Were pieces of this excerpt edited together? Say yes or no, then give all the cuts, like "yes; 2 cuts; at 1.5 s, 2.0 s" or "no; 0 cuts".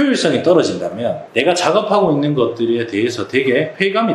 no; 0 cuts